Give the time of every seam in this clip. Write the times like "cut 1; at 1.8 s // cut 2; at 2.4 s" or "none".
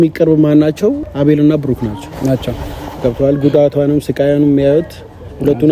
cut 1; at 1.0 s